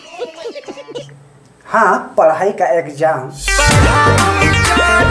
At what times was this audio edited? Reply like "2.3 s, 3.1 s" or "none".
1.2 s, 3.3 s

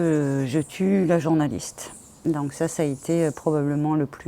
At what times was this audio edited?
none

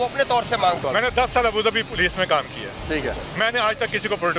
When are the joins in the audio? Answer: 0.8 s, 3.2 s

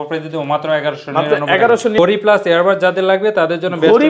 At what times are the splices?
2.0 s

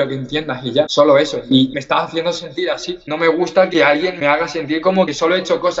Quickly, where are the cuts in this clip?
3.0 s

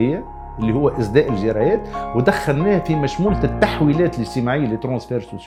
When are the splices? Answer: none

